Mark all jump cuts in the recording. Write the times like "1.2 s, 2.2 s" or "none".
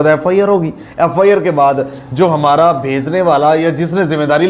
none